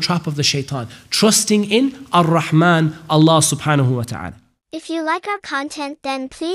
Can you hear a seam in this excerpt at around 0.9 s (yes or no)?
no